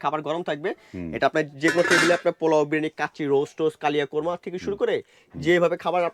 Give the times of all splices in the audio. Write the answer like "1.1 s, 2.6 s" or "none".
none

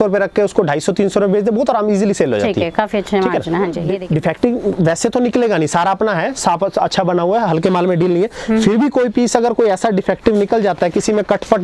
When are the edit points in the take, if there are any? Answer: 3.9 s

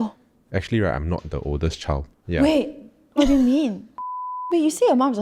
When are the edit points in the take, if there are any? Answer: 4.0 s

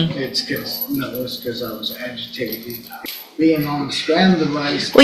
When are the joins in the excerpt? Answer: 2.9 s

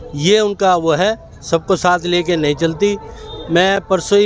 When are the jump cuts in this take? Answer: none

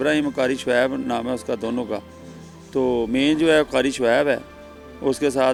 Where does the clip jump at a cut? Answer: none

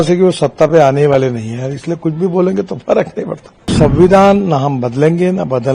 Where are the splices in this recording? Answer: 3.7 s

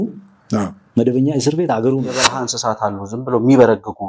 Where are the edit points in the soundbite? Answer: 2.5 s

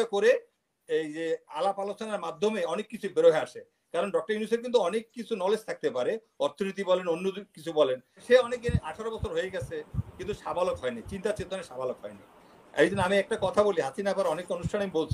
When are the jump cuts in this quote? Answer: 8.2 s

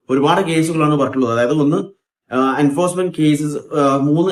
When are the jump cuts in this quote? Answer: none

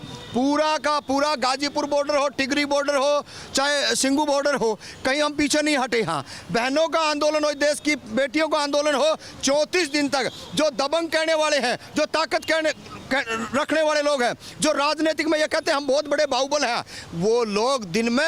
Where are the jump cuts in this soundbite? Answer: none

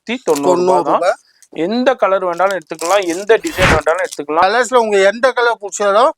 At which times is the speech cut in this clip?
4.4 s

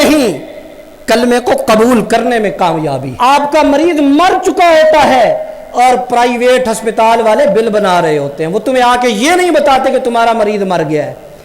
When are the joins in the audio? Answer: 3.2 s

